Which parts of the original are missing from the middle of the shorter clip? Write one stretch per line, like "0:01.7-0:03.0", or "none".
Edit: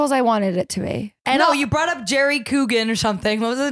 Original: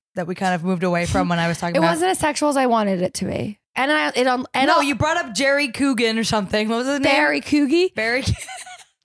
0:03.6-0:04.5